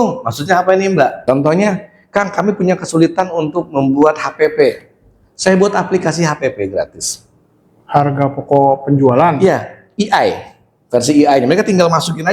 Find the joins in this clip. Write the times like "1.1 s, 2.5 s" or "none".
1.2 s